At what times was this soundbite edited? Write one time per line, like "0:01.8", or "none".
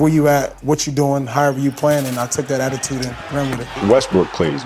0:03.6